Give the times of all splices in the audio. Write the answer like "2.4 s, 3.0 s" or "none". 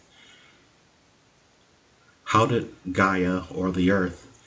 3.3 s

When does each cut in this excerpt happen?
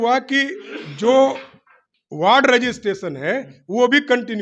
none

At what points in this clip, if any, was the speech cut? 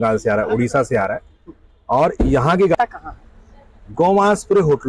2.8 s

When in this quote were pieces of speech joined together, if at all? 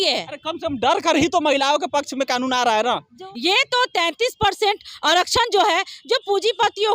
3.2 s

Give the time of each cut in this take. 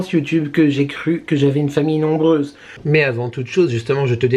2.8 s

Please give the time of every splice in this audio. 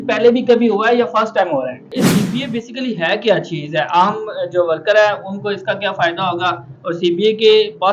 1.9 s

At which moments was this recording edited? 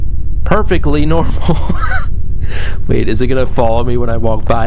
none

